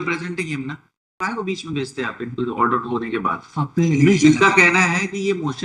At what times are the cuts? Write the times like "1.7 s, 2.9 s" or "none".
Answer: 1.2 s